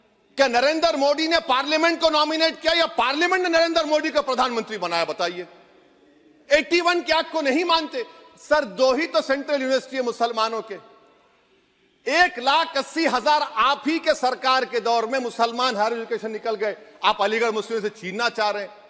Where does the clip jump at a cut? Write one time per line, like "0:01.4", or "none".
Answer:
none